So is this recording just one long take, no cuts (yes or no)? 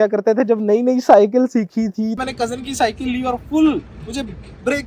no